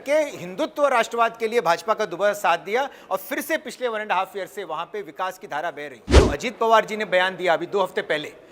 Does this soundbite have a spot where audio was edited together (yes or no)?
yes